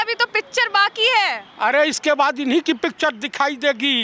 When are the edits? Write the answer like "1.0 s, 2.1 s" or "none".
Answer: none